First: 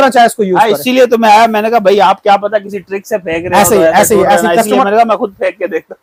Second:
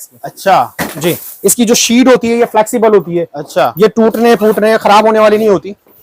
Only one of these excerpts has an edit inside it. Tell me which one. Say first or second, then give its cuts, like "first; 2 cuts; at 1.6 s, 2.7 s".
second; 1 cut; at 1.3 s